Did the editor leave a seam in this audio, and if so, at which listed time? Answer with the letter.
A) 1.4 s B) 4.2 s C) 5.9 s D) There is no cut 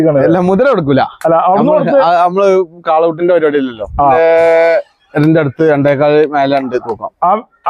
B